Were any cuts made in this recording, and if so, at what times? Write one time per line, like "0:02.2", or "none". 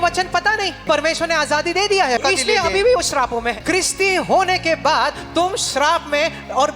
0:00.8
0:02.2
0:03.6

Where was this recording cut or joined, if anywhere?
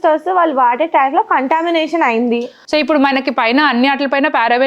0:02.5

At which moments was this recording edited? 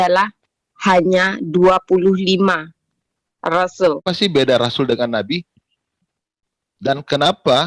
0:04.0

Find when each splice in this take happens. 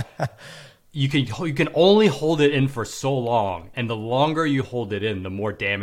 0:03.7

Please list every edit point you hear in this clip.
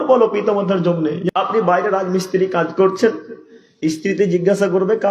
0:01.3

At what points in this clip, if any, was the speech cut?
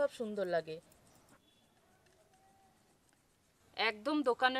0:01.4
0:03.6

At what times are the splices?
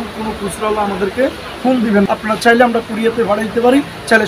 none

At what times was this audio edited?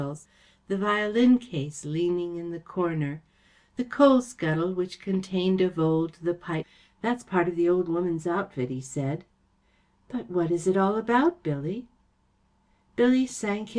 none

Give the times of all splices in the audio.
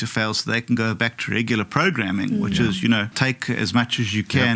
0:03.2

